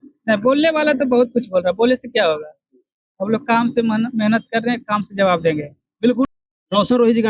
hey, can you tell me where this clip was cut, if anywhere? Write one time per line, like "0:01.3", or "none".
0:06.3